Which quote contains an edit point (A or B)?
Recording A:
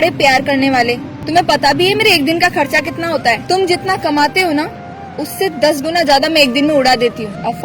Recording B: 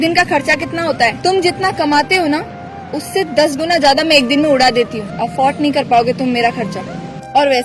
A